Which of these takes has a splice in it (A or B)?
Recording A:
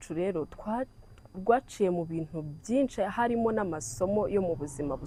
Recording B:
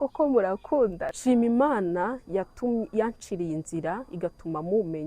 B